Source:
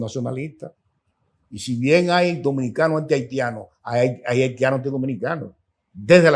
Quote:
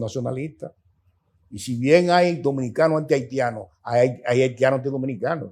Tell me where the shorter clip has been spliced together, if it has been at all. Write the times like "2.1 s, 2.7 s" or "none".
none